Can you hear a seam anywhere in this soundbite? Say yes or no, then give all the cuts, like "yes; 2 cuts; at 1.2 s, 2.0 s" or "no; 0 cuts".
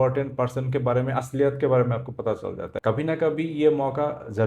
yes; 1 cut; at 2.7 s